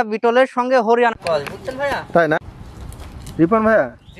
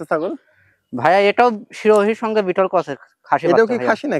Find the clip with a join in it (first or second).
first